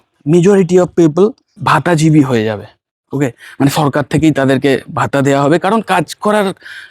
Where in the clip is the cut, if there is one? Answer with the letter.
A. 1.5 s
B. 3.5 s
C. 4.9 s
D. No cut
A